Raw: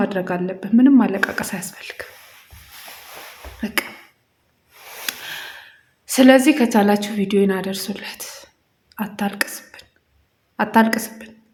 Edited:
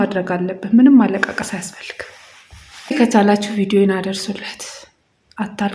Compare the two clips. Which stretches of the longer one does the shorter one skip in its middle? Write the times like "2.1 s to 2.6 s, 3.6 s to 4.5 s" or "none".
3.0 s to 6.6 s

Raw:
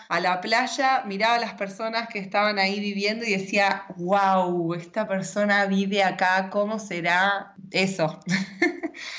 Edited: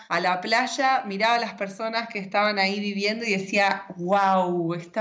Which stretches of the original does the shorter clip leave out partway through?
none

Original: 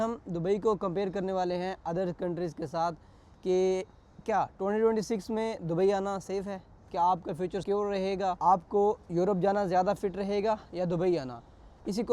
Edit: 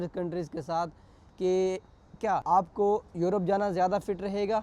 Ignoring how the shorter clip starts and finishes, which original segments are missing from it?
4.5 s to 8.4 s

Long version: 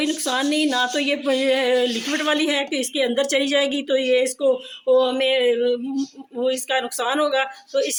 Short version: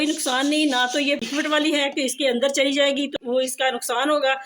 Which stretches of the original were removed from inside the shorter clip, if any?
1.2 s to 2.0 s, 3.8 s to 6.2 s

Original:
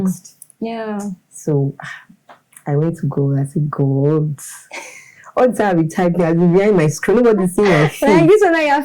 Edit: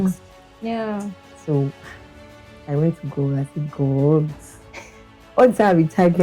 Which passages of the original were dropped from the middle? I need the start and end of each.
none

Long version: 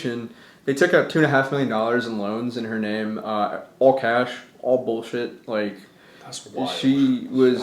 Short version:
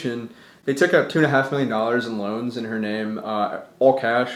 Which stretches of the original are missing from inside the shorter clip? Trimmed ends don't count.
none

